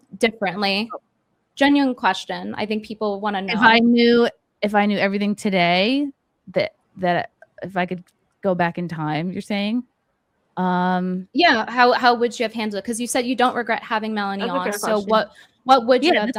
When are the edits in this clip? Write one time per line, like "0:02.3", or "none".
none